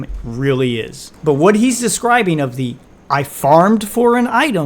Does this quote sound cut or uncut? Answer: cut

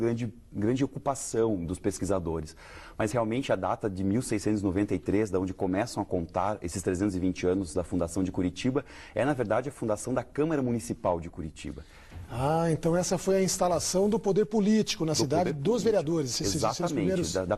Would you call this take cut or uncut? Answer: cut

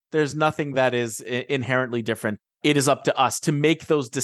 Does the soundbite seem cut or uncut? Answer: uncut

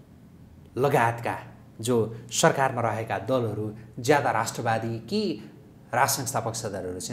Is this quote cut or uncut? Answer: uncut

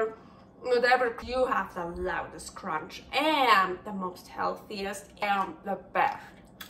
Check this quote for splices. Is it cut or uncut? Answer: cut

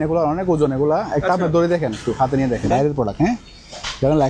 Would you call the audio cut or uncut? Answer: cut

